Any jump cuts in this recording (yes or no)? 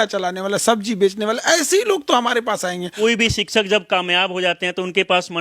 yes